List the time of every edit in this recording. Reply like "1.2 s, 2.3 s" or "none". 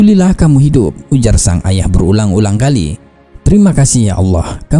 none